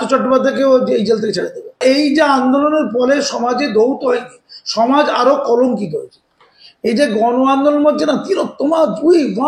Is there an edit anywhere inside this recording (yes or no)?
no